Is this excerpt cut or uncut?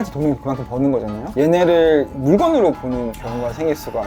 cut